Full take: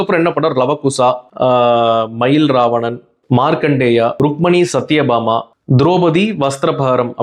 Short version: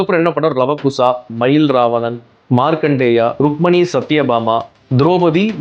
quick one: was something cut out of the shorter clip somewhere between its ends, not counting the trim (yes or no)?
yes